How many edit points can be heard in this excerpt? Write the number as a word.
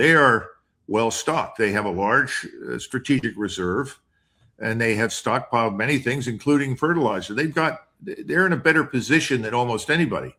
zero